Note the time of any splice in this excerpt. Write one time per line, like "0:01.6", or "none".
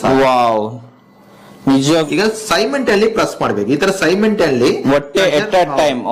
0:01.9